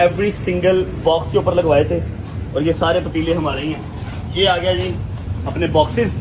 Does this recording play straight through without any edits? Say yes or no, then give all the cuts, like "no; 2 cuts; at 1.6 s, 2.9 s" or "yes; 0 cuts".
yes; 0 cuts